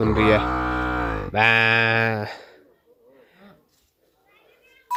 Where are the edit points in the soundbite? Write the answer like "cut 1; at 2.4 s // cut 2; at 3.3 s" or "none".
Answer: none